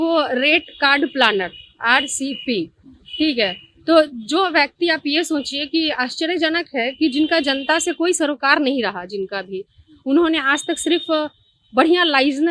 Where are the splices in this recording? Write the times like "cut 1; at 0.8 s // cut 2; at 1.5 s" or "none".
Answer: none